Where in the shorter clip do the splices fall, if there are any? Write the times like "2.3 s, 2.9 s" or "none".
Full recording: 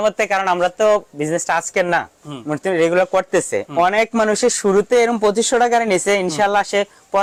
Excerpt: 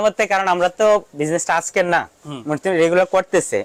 none